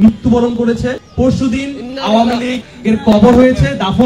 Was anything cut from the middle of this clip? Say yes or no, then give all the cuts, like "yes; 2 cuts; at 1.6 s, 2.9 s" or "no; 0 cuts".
yes; 2 cuts; at 1.0 s, 2.7 s